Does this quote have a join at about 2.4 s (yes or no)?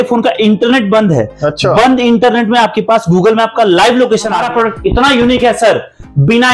no